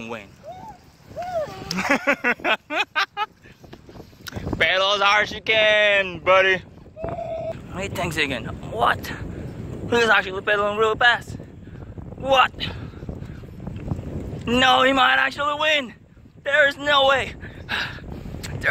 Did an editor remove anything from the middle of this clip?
yes; 1 cut; at 7.5 s

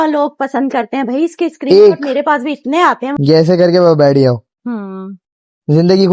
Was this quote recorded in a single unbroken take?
no; 1 cut; at 3.1 s

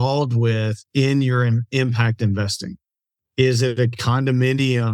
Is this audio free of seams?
yes; 0 cuts

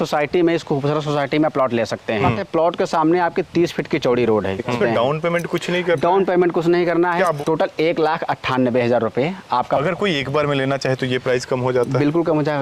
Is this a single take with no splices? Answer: no; 4 cuts; at 2.4 s, 4.7 s, 7.4 s, 9.8 s

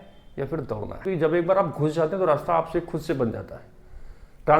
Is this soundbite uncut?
no; 1 cut; at 1.0 s

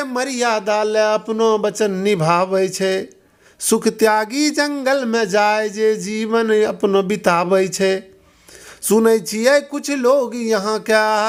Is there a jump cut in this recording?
no; 0 cuts

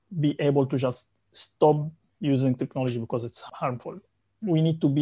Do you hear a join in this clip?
yes; 1 cut; at 3.4 s

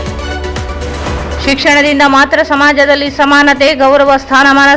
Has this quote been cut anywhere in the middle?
no; 0 cuts

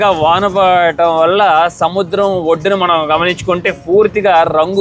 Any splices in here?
no; 0 cuts

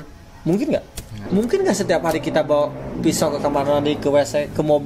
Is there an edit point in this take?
yes; 1 cut; at 1.2 s

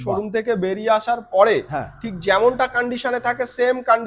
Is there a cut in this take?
no; 0 cuts

